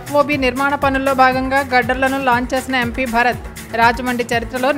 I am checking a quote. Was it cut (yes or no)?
no